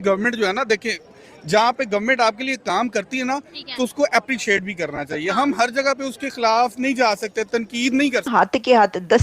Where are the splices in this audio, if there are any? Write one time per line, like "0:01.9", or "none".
0:08.2